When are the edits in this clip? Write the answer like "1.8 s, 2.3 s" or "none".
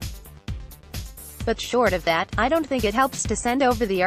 1.4 s